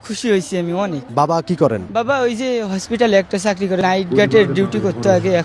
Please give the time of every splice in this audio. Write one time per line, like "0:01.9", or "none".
0:01.0
0:01.9
0:03.8